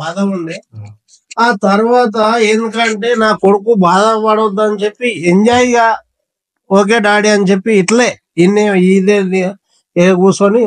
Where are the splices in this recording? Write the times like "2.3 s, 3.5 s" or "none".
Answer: none

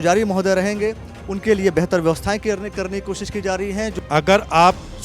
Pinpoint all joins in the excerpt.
3.9 s

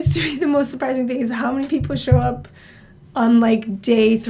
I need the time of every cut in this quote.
none

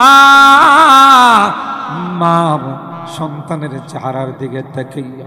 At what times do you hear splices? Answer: none

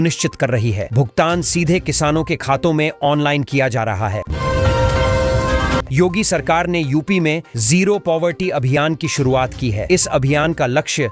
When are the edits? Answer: 4.3 s, 5.8 s

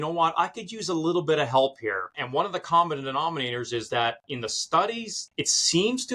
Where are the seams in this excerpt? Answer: 2.2 s, 5.1 s

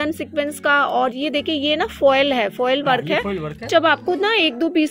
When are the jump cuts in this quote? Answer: 3.7 s

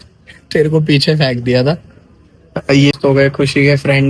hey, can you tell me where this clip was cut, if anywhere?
3.0 s

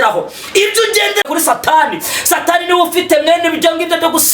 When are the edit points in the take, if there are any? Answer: 1.2 s

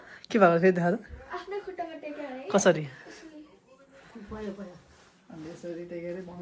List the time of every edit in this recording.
none

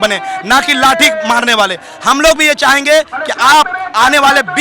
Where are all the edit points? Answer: none

